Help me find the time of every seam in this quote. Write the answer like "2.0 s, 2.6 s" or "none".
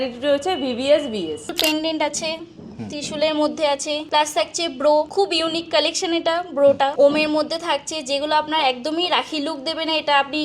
1.6 s, 4.0 s, 5.1 s, 6.9 s